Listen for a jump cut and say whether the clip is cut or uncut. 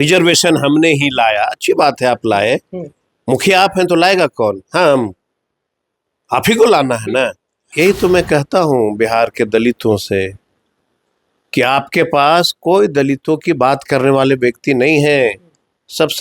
cut